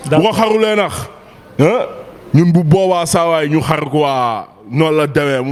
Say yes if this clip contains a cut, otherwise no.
no